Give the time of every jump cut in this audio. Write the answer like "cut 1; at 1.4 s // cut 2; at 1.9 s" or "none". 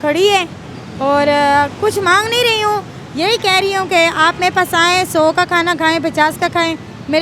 none